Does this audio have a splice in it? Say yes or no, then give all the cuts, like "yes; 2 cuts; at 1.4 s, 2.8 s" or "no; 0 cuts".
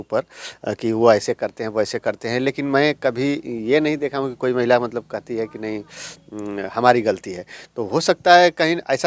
no; 0 cuts